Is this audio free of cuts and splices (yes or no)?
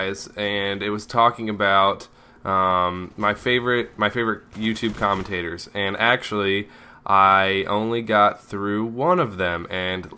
yes